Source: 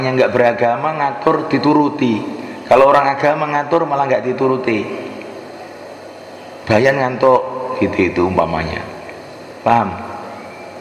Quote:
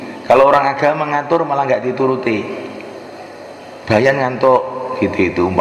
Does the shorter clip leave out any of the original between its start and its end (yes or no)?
yes